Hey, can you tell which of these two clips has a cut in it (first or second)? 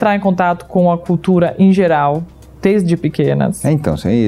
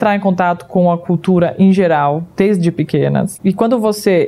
second